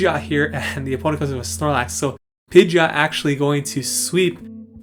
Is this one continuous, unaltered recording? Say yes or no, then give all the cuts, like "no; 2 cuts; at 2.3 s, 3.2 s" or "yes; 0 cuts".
yes; 0 cuts